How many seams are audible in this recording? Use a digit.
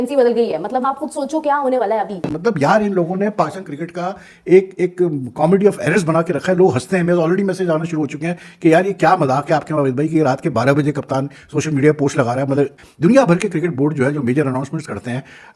2